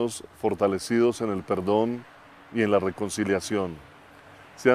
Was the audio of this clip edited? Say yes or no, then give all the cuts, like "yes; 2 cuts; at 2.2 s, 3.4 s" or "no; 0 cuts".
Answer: yes; 1 cut; at 3.6 s